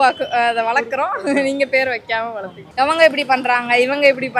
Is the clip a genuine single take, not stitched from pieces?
no; 1 cut; at 2.6 s

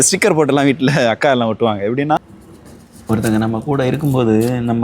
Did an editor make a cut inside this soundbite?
yes; 1 cut; at 2.2 s

